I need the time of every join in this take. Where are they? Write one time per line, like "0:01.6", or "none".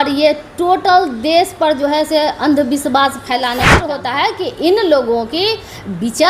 0:03.7

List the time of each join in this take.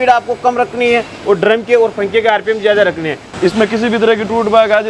0:03.2

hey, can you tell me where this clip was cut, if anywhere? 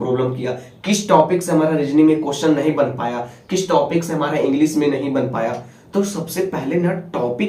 none

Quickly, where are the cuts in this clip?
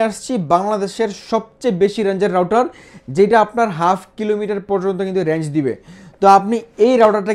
none

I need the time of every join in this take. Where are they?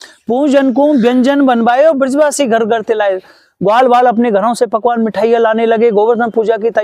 none

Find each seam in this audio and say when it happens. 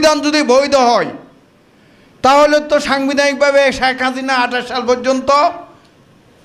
none

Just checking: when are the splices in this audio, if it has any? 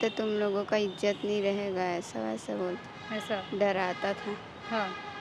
none

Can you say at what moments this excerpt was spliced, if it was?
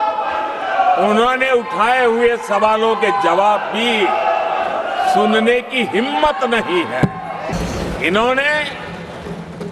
0:07.5

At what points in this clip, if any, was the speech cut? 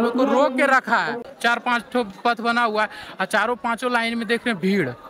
0:01.2

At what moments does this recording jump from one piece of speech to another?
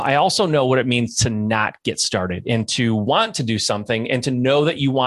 none

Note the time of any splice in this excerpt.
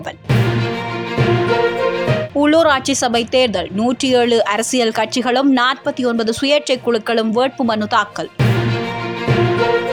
none

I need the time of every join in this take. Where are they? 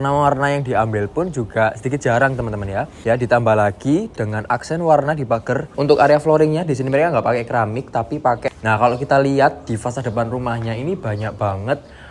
0:02.9
0:05.7
0:08.5

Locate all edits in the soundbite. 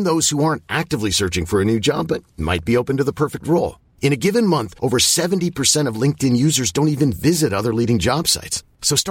none

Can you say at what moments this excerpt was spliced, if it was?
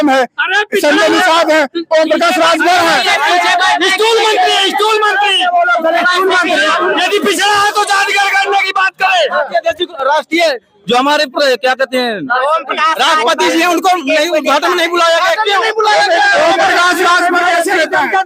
none

